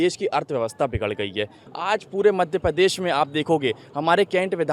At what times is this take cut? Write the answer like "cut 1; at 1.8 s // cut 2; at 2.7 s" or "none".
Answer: cut 1; at 1.6 s